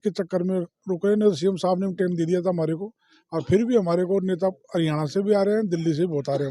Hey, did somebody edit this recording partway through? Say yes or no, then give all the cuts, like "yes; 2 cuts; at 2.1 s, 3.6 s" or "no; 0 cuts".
no; 0 cuts